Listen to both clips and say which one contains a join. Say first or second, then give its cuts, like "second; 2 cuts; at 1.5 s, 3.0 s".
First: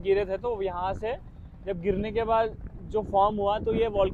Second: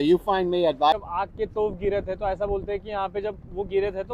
second; 1 cut; at 0.9 s